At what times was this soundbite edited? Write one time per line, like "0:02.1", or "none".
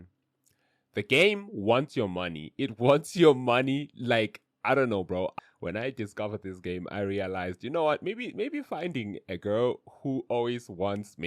0:05.3